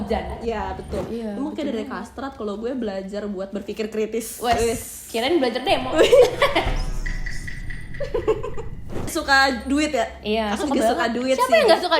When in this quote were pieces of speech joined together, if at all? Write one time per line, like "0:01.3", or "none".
0:01.0
0:09.1